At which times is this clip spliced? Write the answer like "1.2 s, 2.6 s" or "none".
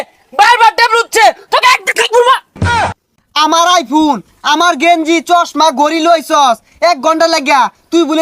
2.9 s